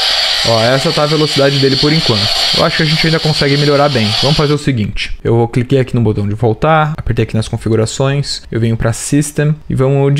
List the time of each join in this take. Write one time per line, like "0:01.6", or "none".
none